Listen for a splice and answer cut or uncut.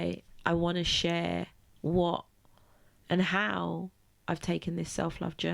uncut